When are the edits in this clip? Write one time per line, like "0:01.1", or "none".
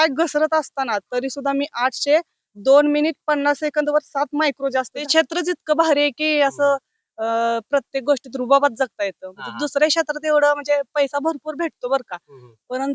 0:05.0

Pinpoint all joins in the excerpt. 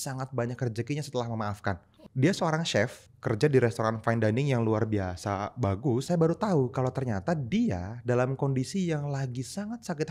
0:02.0
0:03.1
0:06.0

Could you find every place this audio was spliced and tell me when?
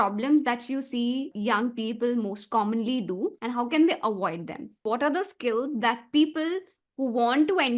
0:01.3
0:03.4
0:04.8

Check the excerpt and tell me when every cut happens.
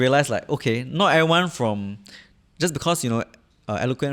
none

